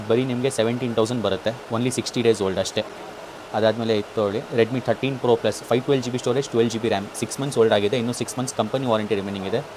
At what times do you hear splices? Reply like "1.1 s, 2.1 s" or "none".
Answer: none